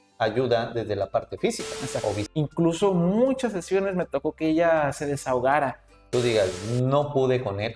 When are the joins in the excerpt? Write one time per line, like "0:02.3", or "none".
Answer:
0:02.2
0:06.1